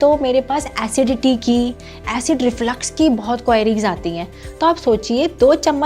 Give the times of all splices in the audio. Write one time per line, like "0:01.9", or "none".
none